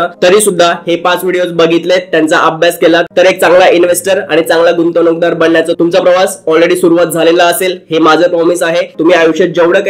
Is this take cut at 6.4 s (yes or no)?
no